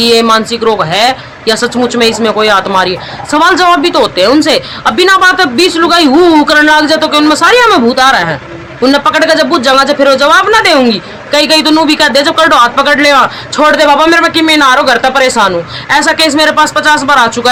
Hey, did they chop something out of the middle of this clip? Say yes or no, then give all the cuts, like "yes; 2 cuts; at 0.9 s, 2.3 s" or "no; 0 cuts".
no; 0 cuts